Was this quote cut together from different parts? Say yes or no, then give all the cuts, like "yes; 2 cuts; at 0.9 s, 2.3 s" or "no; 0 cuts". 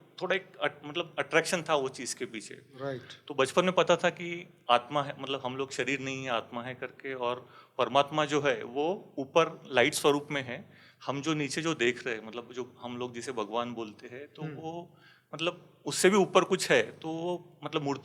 no; 0 cuts